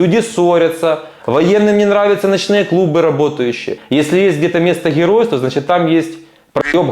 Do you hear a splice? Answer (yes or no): yes